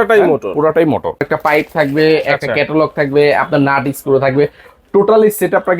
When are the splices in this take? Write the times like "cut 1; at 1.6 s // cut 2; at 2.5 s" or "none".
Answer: cut 1; at 1.2 s